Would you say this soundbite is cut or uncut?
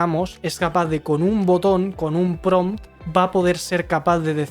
cut